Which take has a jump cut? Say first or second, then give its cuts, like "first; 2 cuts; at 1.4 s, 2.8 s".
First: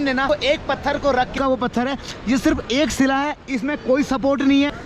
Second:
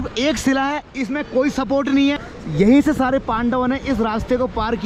first; 1 cut; at 1.4 s